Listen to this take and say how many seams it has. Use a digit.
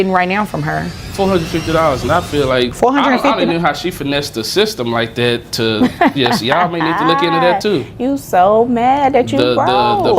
2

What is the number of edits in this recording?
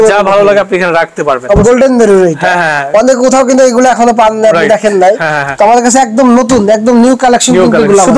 1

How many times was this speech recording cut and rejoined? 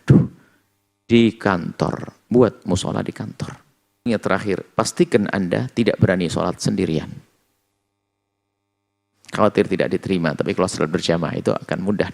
1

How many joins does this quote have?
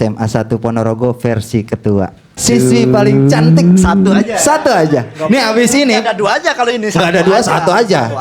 1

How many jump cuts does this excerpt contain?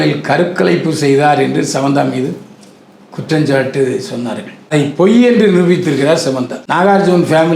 2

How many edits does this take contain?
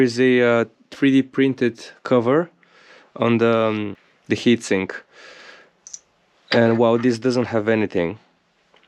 0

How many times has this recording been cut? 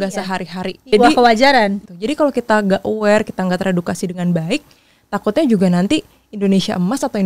2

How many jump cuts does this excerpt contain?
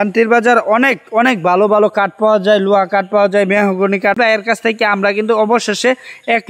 1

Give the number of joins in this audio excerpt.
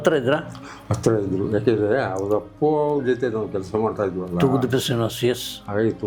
0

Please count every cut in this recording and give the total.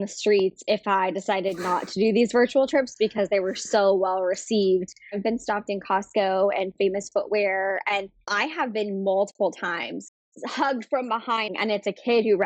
3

